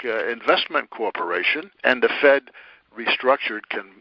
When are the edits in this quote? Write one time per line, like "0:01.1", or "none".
0:01.7